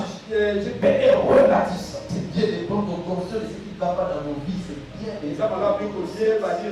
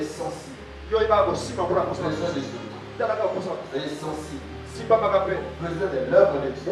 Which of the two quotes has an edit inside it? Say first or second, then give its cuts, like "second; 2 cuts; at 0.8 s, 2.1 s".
first; 2 cuts; at 0.8 s, 2.0 s